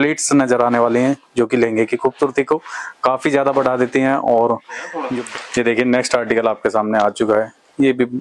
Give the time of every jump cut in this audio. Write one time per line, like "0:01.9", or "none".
0:05.0